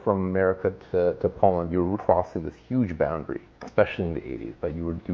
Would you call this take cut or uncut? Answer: cut